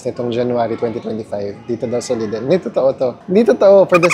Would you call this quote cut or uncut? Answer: uncut